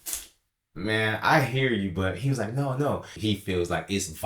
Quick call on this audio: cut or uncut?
cut